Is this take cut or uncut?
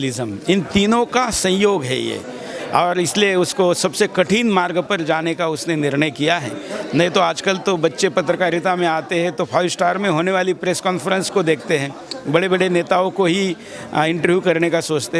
uncut